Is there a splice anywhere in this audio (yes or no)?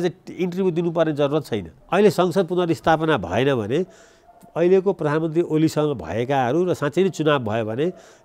yes